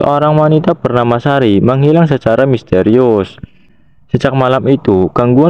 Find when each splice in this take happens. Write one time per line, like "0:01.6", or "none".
0:03.6